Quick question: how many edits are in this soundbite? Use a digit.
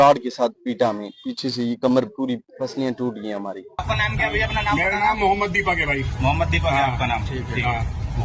2